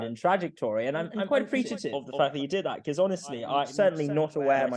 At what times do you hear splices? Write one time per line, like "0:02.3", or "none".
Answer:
0:01.6
0:03.7